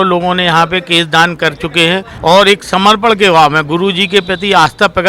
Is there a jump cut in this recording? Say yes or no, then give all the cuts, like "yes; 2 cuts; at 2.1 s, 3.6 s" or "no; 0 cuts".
yes; 1 cut; at 2.1 s